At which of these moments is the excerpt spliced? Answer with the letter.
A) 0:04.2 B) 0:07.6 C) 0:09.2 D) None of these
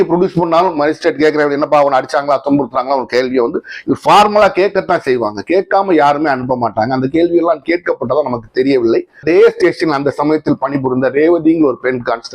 C